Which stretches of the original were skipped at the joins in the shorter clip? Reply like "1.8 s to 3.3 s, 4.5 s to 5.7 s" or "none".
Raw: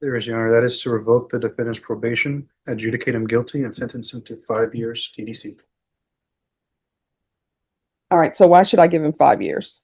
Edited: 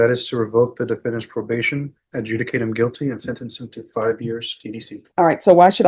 5.5 s to 7.9 s